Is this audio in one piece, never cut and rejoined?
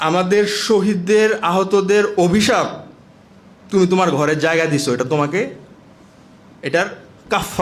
yes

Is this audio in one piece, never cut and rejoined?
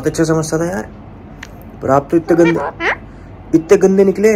yes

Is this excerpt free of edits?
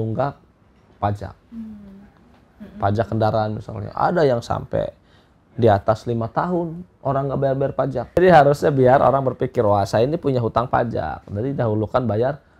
no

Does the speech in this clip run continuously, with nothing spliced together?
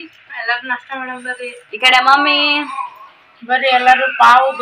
yes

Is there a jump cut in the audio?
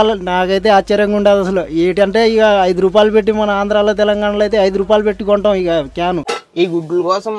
yes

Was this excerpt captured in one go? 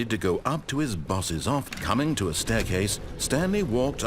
no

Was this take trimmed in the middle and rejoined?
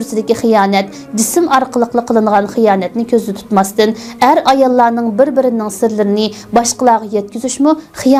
no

